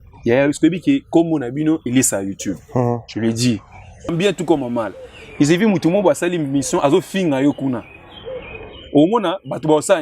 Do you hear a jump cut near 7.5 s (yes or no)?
no